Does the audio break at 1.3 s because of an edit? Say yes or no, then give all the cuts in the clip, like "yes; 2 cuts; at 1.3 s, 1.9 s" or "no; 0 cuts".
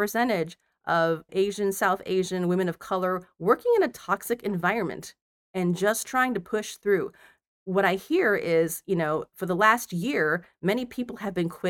yes; 1 cut; at 1.3 s